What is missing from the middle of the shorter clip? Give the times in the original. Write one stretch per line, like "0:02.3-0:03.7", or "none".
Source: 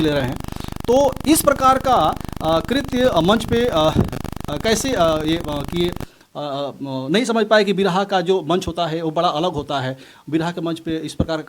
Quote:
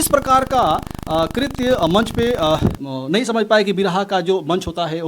0:04.2-0:06.9